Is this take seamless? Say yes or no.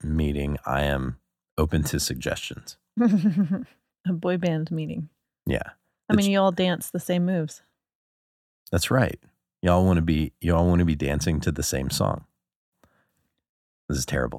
yes